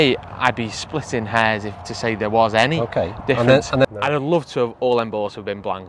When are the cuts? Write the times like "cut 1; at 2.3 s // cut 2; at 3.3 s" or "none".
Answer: cut 1; at 3.8 s